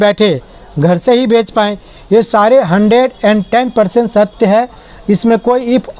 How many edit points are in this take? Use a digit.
0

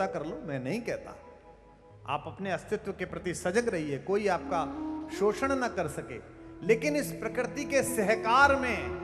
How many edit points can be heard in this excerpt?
0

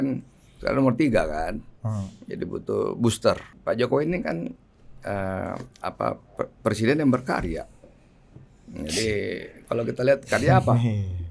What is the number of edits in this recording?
1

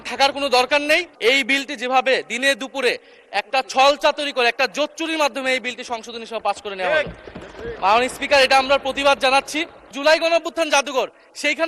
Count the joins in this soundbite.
2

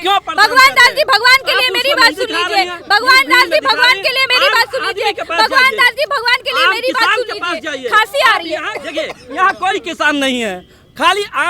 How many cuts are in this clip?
0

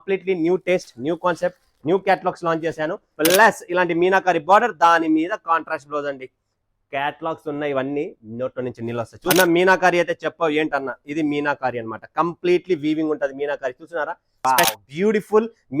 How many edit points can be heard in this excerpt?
3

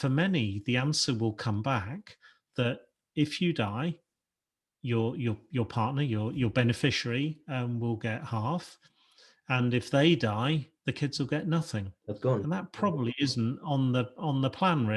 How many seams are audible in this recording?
0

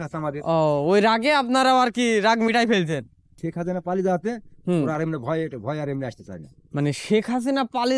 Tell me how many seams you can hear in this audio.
1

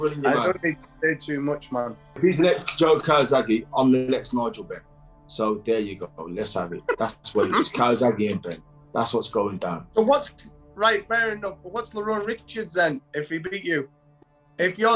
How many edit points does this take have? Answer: 1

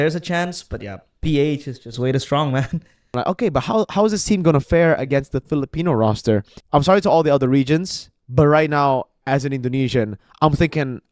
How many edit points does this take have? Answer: 2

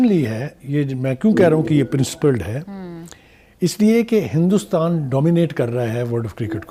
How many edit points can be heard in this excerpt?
0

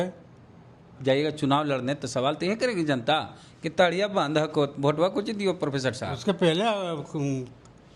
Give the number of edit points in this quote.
1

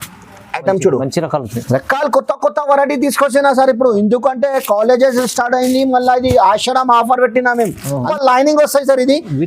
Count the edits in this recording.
1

